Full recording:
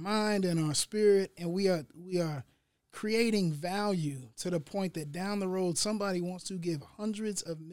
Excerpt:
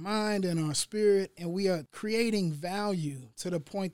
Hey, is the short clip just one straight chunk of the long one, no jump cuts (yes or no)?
no